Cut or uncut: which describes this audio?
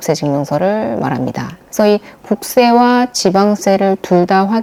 uncut